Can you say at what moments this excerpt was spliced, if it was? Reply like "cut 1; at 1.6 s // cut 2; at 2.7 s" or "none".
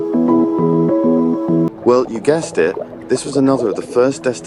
cut 1; at 1.7 s